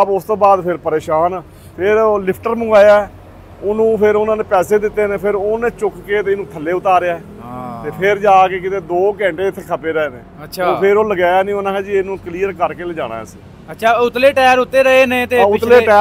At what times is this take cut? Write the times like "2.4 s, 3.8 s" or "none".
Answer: none